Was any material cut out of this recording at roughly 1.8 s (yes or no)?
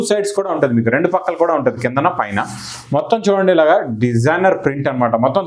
no